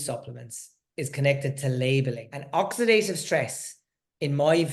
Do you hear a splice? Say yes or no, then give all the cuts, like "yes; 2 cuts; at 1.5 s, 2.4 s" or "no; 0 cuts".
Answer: yes; 1 cut; at 2.3 s